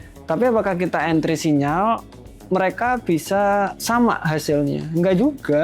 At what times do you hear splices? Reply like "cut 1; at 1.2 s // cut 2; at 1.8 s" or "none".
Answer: cut 1; at 3.8 s